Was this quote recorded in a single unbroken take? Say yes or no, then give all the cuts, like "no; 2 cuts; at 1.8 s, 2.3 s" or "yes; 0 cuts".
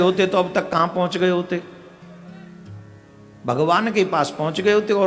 yes; 0 cuts